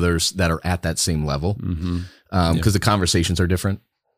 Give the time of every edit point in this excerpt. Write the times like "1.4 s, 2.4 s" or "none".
none